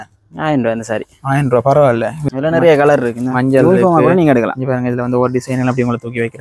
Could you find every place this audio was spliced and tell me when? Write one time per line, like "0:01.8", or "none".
0:02.1